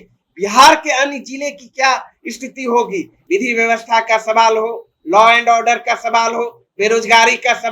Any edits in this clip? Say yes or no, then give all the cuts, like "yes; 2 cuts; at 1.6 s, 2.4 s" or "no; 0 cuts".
yes; 1 cut; at 3.2 s